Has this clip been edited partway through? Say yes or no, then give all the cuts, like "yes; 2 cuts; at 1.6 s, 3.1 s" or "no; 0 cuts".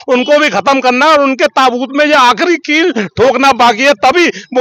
no; 0 cuts